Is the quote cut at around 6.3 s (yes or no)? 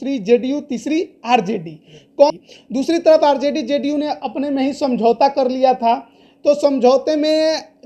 no